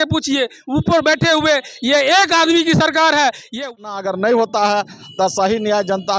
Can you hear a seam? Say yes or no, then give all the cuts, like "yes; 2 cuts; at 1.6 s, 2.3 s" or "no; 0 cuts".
yes; 1 cut; at 3.6 s